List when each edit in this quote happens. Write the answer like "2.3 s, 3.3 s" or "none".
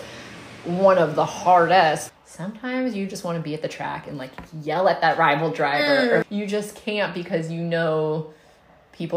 2.1 s, 6.2 s